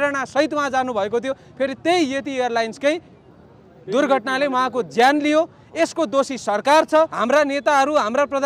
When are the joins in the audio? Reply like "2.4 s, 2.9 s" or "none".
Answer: 7.2 s